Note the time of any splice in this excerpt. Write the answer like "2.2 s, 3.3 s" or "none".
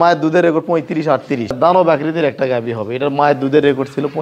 1.6 s